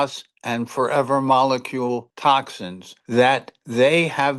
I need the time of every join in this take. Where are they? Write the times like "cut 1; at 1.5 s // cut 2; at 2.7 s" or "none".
none